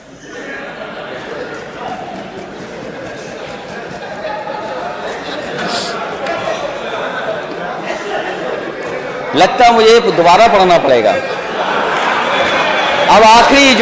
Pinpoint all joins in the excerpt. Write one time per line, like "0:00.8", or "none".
none